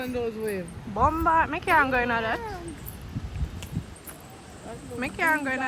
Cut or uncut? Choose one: uncut